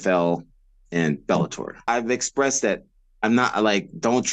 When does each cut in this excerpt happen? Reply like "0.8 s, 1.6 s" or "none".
1.8 s